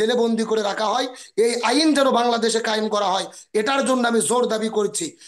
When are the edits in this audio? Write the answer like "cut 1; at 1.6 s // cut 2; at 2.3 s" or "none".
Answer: none